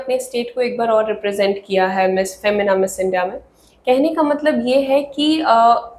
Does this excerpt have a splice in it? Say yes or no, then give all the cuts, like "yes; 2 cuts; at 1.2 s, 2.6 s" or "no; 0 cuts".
no; 0 cuts